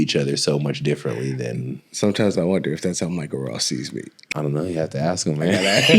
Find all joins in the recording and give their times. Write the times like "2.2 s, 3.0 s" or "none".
4.1 s

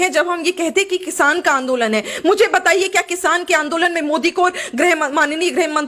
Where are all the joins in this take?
none

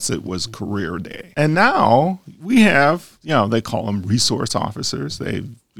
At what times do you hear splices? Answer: none

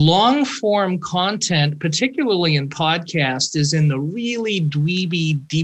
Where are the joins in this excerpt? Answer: none

